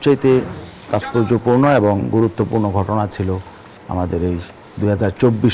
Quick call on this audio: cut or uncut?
uncut